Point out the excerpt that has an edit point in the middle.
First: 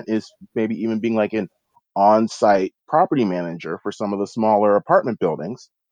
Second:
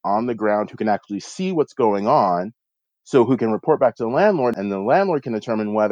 second; 1 cut; at 4.6 s

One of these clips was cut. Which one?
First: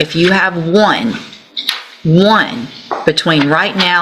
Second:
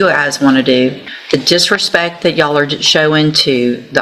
second; 1 cut; at 1.1 s

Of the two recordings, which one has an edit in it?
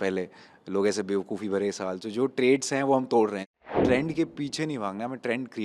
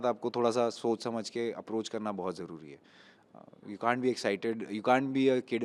first; 1 cut; at 3.7 s

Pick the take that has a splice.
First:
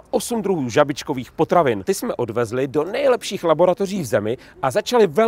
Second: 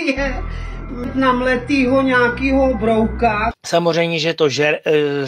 first; 1 cut; at 1.8 s

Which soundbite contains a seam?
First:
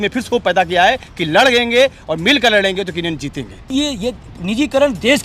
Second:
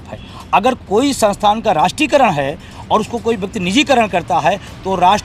first; 1 cut; at 3.7 s

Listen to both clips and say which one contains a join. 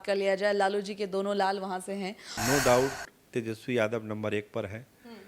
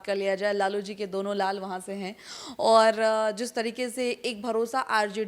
first; 1 cut; at 2.2 s

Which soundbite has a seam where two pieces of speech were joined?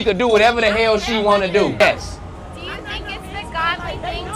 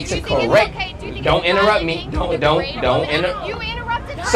first; 1 cut; at 1.8 s

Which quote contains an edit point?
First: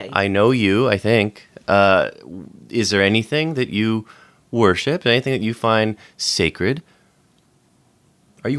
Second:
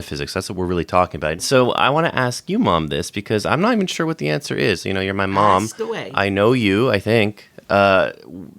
second; 1 cut; at 1.4 s

